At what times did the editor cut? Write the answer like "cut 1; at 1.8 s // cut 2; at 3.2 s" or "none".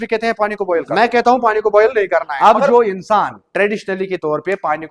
cut 1; at 0.9 s // cut 2; at 2.3 s